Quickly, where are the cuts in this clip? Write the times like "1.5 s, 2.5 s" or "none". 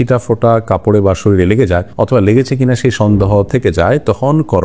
none

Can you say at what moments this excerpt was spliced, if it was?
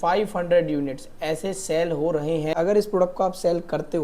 2.5 s

